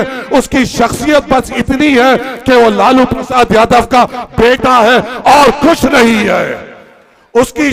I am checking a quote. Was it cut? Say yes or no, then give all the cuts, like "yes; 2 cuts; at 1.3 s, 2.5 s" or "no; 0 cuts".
no; 0 cuts